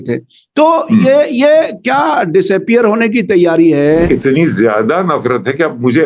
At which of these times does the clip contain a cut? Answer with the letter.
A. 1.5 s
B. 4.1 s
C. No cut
B